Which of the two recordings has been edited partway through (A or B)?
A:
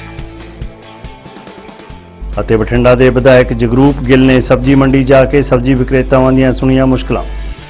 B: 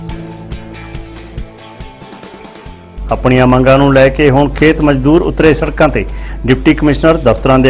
B